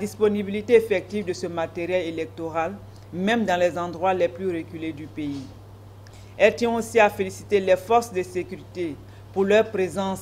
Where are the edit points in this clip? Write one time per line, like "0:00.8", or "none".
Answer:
none